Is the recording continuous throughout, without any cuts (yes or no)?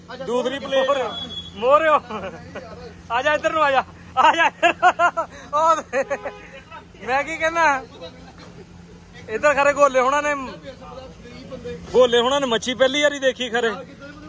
no